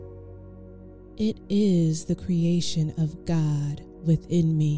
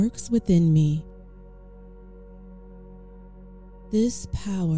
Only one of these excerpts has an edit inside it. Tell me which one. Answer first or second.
first